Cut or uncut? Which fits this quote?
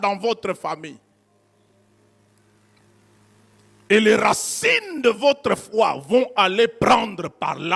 uncut